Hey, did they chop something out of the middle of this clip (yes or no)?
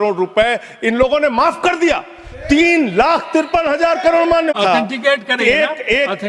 yes